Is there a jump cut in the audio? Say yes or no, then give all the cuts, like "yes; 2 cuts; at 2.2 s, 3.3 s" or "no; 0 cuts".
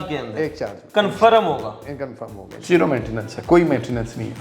yes; 1 cut; at 2.5 s